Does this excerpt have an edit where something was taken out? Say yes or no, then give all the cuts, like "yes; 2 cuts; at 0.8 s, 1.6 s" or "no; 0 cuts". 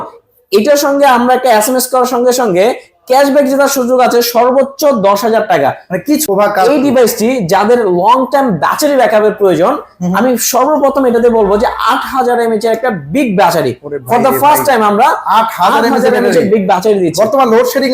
yes; 1 cut; at 6.2 s